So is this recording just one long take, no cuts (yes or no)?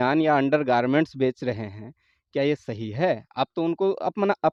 yes